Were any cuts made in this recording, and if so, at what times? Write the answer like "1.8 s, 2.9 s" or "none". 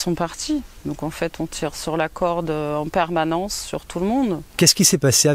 4.5 s